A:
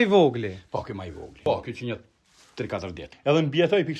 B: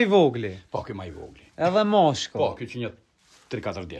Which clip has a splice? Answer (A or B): A